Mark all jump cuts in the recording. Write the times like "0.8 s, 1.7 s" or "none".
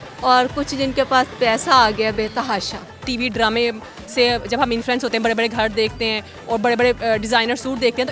3.1 s